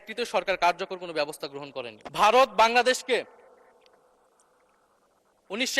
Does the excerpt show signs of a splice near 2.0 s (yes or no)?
yes